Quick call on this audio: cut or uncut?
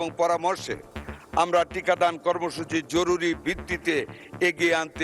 uncut